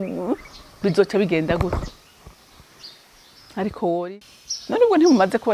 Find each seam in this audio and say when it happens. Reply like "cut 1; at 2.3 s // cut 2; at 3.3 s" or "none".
cut 1; at 4.1 s